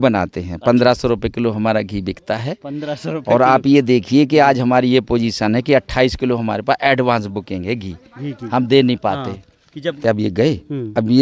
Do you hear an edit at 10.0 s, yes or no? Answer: yes